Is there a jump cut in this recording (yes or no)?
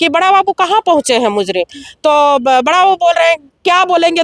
no